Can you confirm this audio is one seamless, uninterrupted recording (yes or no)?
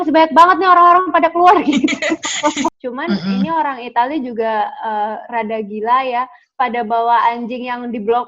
no